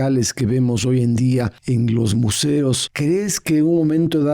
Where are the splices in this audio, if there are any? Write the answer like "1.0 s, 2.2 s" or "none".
1.6 s, 2.9 s